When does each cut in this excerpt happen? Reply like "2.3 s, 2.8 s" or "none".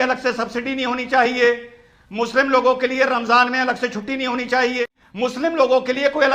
4.8 s